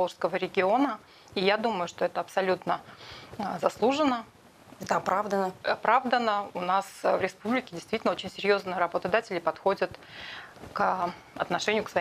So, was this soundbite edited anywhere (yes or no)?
no